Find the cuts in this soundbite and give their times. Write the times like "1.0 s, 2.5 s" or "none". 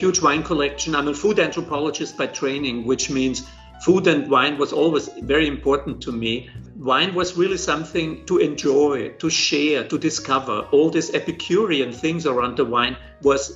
6.7 s